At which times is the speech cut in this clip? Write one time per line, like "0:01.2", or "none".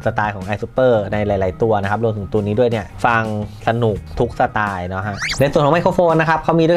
0:02.9
0:04.1
0:05.3